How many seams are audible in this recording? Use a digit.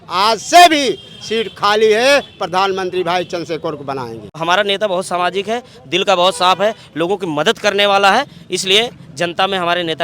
1